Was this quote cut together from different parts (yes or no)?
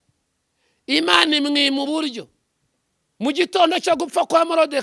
no